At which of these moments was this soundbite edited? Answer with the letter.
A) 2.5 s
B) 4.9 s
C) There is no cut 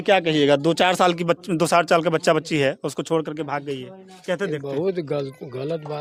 C